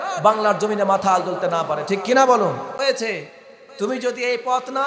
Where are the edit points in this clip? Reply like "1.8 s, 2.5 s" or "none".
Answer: 2.8 s

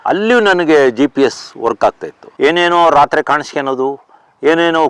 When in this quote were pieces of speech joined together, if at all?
2.3 s

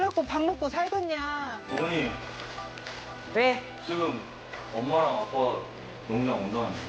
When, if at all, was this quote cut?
1.6 s

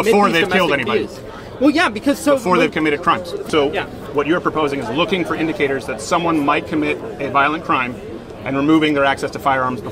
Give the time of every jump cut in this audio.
3.4 s

